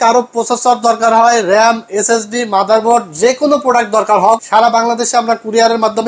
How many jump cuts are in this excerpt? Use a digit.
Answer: 1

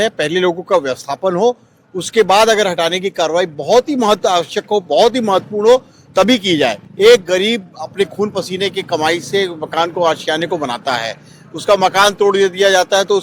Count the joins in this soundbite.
1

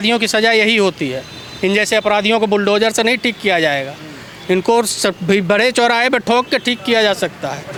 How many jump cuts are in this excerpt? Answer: 0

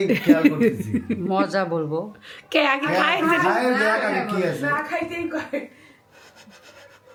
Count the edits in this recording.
0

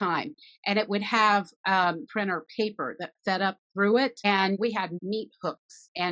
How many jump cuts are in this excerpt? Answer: 2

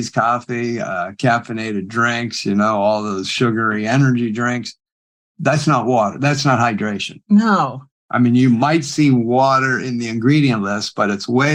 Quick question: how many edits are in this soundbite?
0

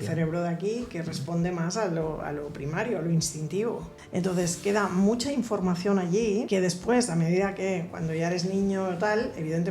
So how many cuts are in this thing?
2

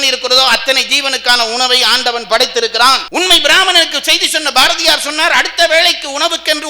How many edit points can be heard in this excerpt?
1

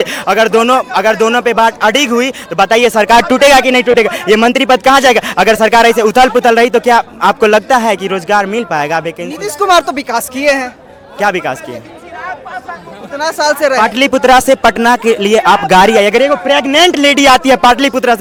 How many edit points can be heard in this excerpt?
0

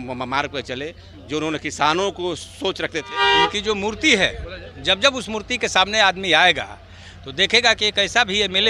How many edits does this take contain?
1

